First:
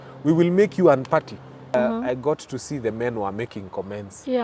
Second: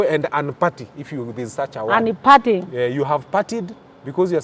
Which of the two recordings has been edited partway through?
first; 1 cut; at 1.7 s

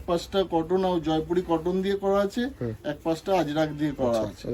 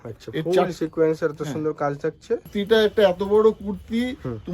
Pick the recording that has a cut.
second; 1 cut; at 2.5 s

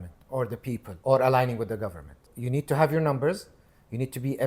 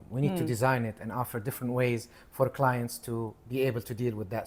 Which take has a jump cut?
first; 2 cuts; at 0.9 s, 2.3 s

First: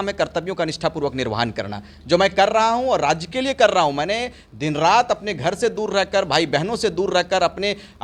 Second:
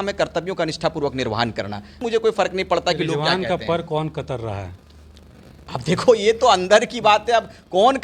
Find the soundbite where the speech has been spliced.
second; 1 cut; at 2.0 s

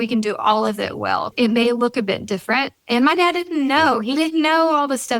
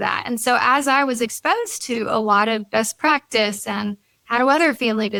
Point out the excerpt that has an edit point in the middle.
first; 1 cut; at 1.3 s

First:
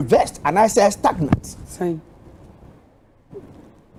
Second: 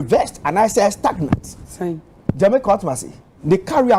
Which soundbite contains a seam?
second; 1 cut; at 2.1 s

